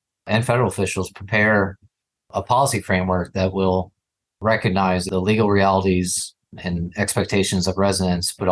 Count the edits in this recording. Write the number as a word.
one